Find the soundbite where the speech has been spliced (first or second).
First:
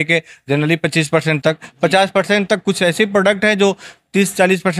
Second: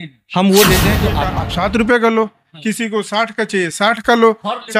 second